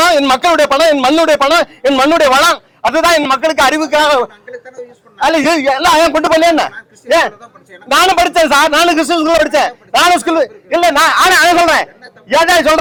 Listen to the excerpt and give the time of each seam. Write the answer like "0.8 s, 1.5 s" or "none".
none